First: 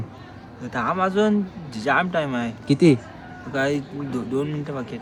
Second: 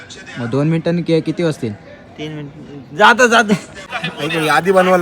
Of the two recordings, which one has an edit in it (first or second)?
second